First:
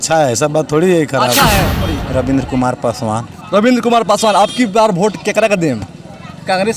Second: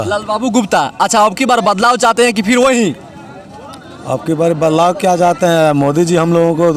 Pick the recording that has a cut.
first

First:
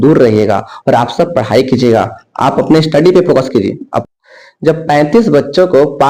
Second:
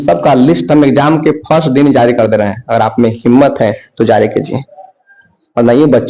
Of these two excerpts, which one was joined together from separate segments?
first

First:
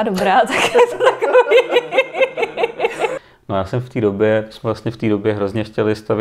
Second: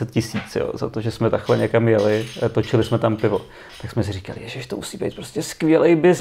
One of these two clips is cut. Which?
first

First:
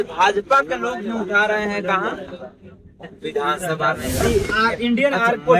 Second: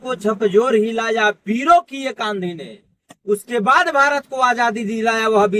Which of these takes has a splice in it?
first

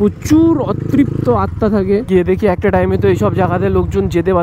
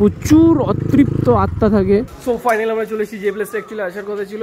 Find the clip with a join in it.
second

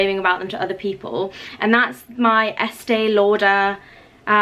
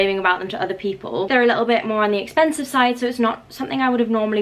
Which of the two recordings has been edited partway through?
second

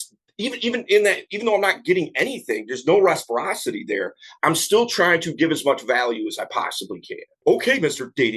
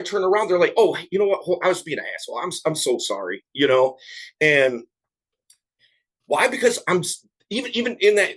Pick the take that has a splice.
first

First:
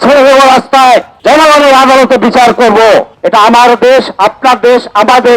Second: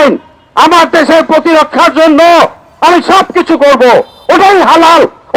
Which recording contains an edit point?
first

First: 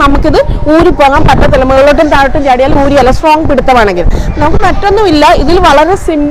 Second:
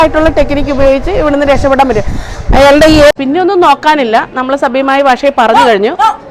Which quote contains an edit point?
second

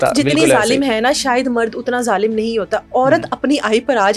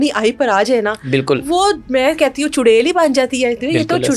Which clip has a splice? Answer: second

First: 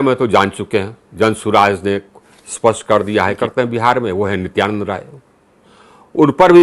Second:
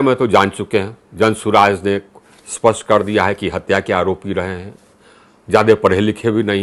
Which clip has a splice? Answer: first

